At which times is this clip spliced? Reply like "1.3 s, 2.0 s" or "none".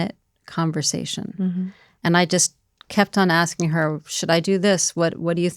1.8 s